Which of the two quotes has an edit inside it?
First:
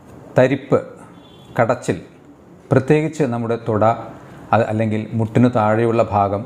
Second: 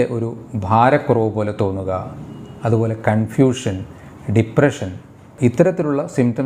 second; 1 cut; at 5.2 s

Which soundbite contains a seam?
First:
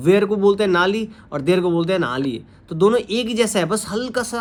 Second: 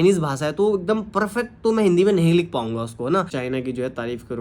second; 1 cut; at 3.4 s

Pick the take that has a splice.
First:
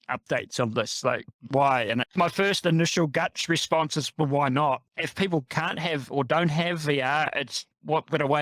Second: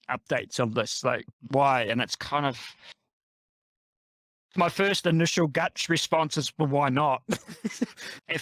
first; 2 cuts; at 2.1 s, 4.8 s

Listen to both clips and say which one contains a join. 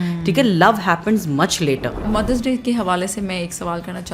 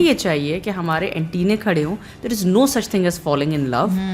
first; 1 cut; at 2.0 s

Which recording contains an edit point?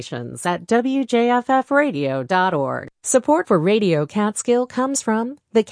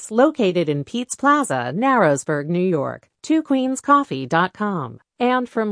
first; 1 cut; at 2.9 s

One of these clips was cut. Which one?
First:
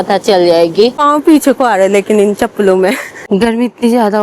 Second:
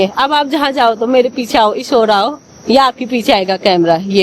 first; 2 cuts; at 1.0 s, 3.1 s

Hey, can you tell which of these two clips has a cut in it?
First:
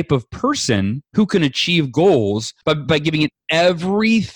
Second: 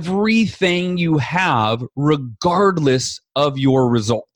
first; 2 cuts; at 1.0 s, 2.5 s

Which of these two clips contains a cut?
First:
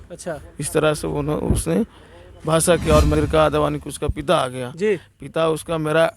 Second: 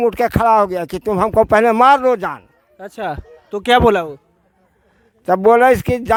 first; 1 cut; at 3.1 s

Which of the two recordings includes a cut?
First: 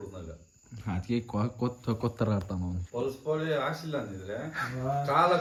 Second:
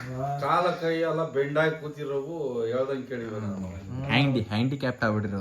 second; 1 cut; at 4.0 s

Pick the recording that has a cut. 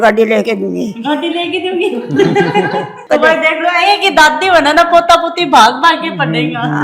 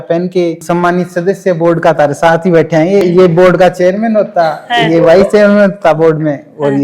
second; 1 cut; at 3.0 s

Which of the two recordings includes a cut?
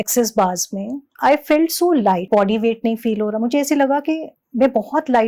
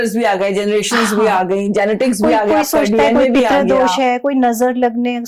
first; 2 cuts; at 1.1 s, 2.3 s

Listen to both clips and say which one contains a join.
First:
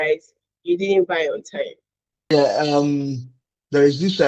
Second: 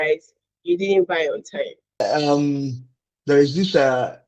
second; 1 cut; at 2.0 s

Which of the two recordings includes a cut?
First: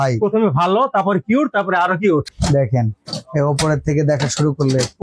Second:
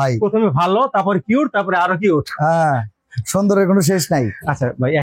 first; 1 cut; at 2.3 s

